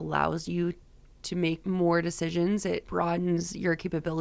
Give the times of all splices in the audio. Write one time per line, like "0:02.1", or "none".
0:01.6
0:02.9